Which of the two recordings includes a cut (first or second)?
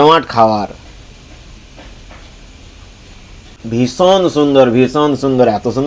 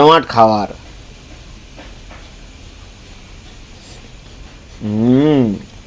first